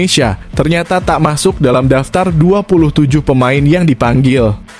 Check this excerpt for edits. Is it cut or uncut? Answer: uncut